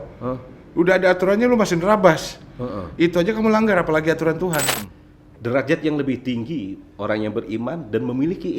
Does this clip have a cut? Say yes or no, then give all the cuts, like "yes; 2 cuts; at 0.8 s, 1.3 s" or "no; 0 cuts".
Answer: yes; 1 cut; at 4.7 s